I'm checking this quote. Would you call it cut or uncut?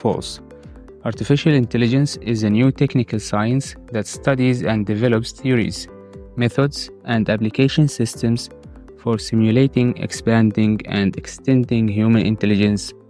uncut